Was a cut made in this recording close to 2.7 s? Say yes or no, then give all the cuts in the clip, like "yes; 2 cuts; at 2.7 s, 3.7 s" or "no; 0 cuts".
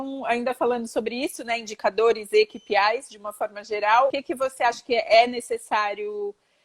no; 1 cut; at 4.1 s